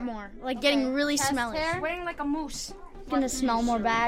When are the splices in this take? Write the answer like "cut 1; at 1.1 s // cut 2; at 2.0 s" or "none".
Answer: cut 1; at 2.9 s